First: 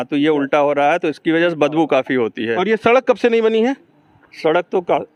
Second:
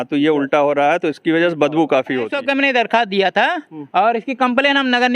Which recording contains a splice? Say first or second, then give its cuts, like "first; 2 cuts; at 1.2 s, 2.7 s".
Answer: second; 1 cut; at 2.3 s